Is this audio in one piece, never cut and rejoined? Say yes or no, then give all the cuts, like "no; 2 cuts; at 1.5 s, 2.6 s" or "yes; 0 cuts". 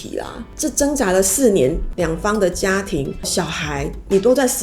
no; 1 cut; at 1.9 s